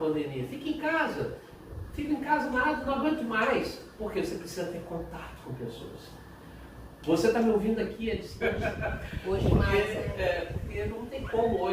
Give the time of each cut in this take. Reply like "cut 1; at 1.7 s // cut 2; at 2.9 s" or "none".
cut 1; at 8.3 s

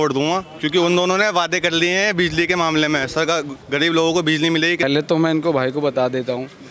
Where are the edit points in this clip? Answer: cut 1; at 4.8 s

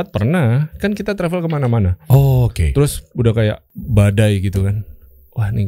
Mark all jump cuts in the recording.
cut 1; at 3.7 s

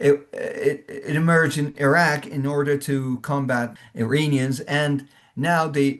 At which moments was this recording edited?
cut 1; at 3.8 s

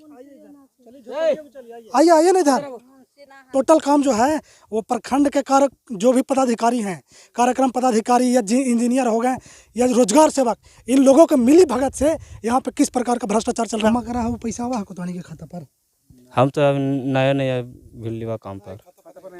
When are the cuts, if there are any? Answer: cut 1; at 3.5 s // cut 2; at 13.9 s

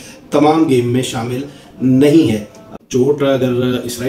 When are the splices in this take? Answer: cut 1; at 2.8 s

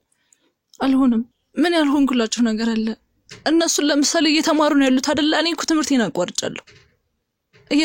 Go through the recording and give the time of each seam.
cut 1; at 1.4 s

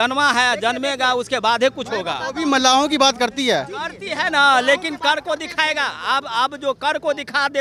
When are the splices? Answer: none

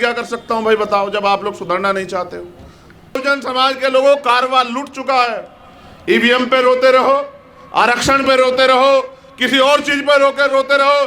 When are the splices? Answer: cut 1; at 3.2 s

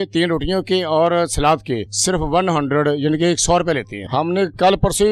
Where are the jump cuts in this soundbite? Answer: cut 1; at 1.9 s // cut 2; at 4.0 s

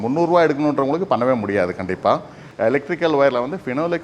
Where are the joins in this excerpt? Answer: cut 1; at 2.4 s

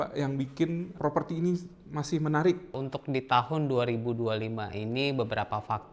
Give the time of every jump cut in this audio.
cut 1; at 0.9 s // cut 2; at 2.7 s

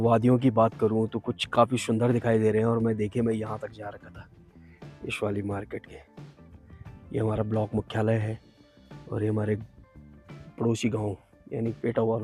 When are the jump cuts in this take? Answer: none

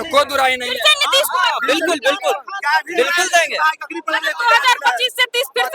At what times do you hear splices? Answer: none

